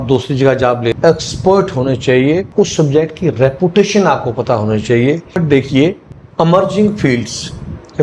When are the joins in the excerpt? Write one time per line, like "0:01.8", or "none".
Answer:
0:00.9
0:05.4

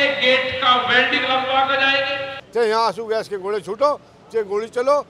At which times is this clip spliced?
0:02.4

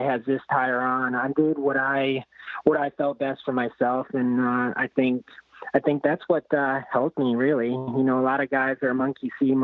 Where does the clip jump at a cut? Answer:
none

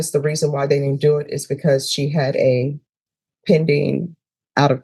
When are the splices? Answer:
none

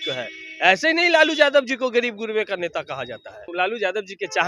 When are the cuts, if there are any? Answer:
0:03.5

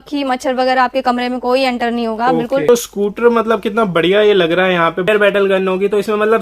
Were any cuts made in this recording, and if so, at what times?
0:02.7
0:05.1

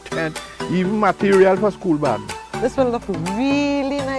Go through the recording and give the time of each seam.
none

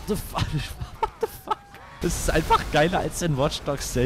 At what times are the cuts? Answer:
0:02.0

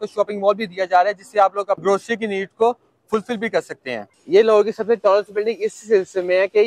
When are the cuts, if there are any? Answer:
0:01.8
0:04.1

